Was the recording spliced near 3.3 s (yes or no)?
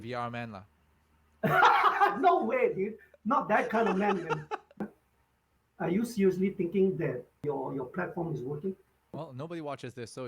no